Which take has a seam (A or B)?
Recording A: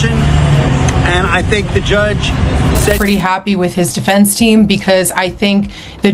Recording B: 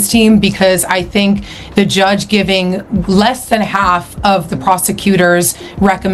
A